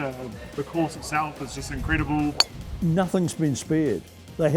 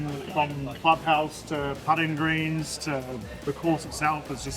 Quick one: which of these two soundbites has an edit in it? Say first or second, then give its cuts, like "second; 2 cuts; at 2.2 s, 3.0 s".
first; 1 cut; at 2.6 s